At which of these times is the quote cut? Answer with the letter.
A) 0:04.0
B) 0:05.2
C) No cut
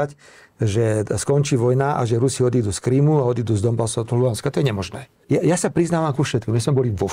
B